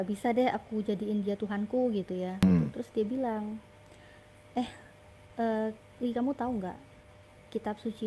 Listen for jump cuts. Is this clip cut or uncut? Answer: cut